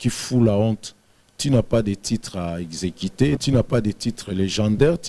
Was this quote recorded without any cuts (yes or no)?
no